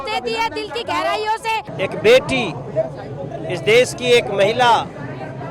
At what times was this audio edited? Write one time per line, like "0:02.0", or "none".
0:01.7